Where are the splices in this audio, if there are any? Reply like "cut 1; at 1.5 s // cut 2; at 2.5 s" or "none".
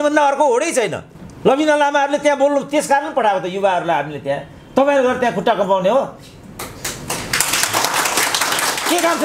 none